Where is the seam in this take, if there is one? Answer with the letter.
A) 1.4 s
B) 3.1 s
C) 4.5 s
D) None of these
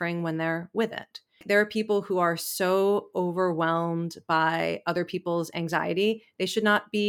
A